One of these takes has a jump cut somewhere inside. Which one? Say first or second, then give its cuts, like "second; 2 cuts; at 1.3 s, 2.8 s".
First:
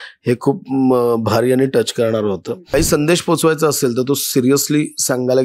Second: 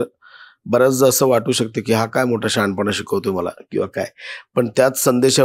first; 1 cut; at 2.5 s